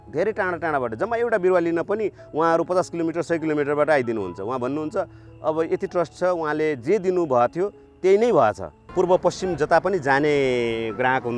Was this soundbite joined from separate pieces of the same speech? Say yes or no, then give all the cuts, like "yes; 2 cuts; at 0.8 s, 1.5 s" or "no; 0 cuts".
yes; 1 cut; at 8.8 s